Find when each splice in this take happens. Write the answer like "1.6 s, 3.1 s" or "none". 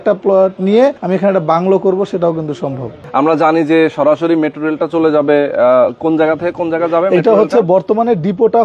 1.0 s, 3.0 s